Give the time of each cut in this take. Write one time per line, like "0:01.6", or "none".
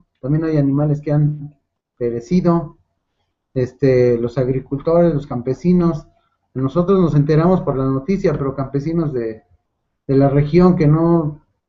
none